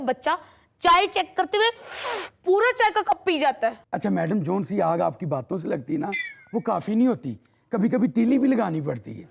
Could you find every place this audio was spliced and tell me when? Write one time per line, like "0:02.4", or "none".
0:03.8